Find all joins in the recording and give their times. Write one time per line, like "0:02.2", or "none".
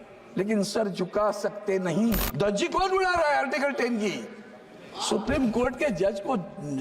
0:02.3